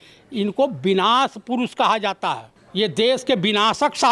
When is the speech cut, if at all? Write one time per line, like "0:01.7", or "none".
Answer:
0:02.6